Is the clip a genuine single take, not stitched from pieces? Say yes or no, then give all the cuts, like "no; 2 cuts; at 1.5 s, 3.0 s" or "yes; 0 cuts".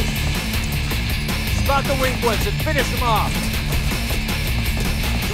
yes; 0 cuts